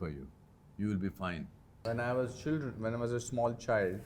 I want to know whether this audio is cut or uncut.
cut